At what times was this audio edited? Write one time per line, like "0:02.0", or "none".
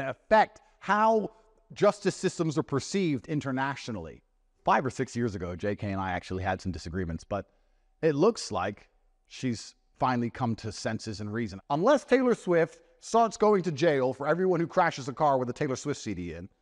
0:04.6
0:11.6